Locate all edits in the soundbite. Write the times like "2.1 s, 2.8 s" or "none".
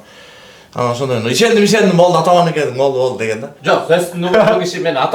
3.5 s